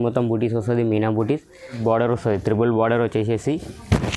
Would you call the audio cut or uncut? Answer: cut